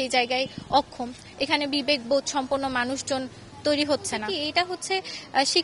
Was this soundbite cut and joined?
yes; 1 cut; at 4.3 s

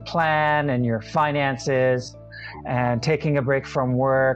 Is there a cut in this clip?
no; 0 cuts

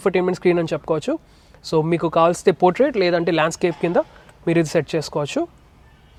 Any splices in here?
no; 0 cuts

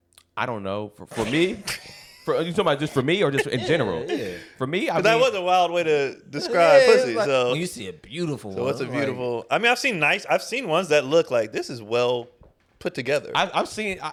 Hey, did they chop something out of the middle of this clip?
no; 0 cuts

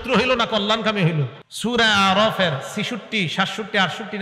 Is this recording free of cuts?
no; 1 cut; at 1.4 s

